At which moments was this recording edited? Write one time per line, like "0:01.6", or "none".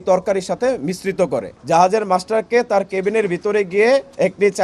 0:01.5